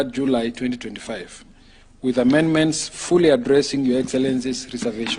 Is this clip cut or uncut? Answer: uncut